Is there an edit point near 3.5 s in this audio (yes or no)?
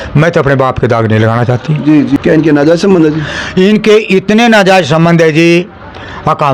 no